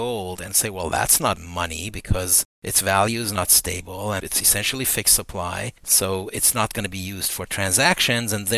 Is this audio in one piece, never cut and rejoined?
yes; 0 cuts

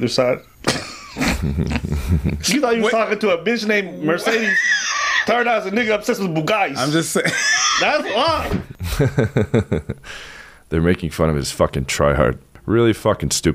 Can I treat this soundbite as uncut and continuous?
no; 2 cuts; at 8.7 s, 12.6 s

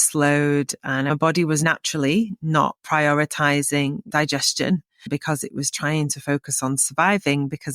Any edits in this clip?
yes; 1 cut; at 1.1 s

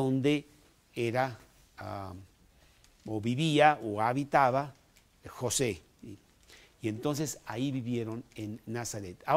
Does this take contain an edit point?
no; 0 cuts

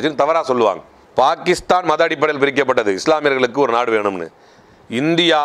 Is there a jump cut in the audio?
no; 0 cuts

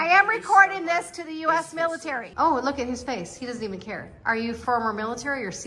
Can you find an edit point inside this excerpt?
yes; 2 cuts; at 2.3 s, 4.6 s

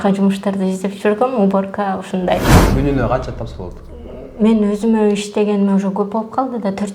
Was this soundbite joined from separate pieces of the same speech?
yes; 1 cut; at 2.7 s

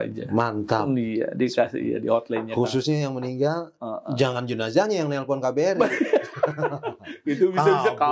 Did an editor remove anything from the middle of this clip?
no; 0 cuts

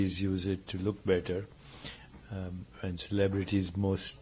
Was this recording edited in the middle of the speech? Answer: no; 0 cuts

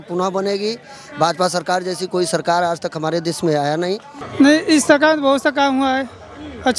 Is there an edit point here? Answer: yes; 1 cut; at 4.2 s

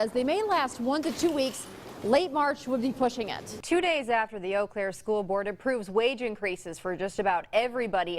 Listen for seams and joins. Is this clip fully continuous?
no; 1 cut; at 3.5 s

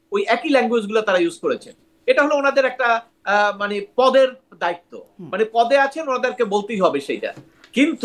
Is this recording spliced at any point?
no; 0 cuts

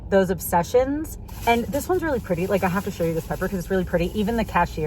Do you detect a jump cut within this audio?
yes; 1 cut; at 1.2 s

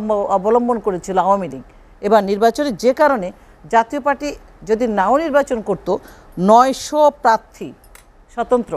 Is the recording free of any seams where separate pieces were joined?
yes; 0 cuts

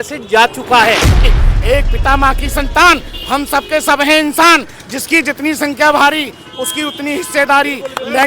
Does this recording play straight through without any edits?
no; 1 cut; at 1.3 s

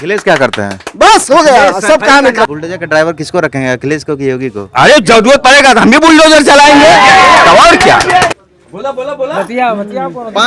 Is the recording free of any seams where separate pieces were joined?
no; 2 cuts; at 2.5 s, 8.4 s

